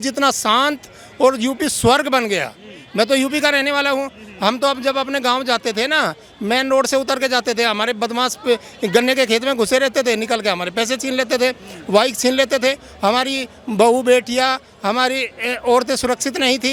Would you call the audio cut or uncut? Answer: uncut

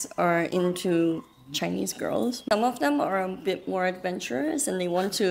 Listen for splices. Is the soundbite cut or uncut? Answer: cut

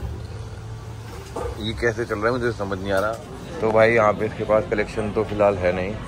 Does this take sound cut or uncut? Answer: cut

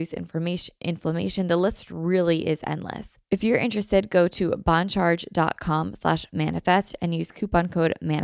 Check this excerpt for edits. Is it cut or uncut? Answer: cut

